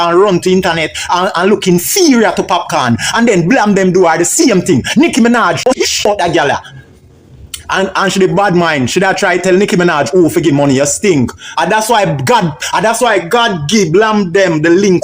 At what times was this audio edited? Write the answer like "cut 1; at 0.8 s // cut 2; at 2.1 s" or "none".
cut 1; at 6.1 s // cut 2; at 11.2 s